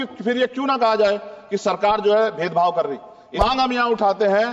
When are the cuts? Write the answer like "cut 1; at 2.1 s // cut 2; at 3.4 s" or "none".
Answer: cut 1; at 3.4 s